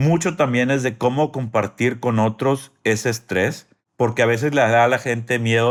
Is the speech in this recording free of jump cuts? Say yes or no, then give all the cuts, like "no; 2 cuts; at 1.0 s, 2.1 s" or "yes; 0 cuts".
yes; 0 cuts